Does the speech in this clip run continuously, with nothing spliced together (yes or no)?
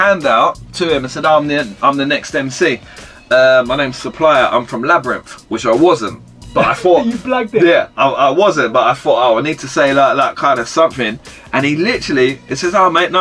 yes